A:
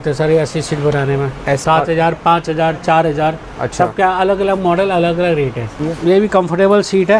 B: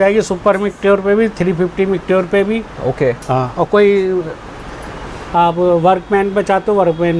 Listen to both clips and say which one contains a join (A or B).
A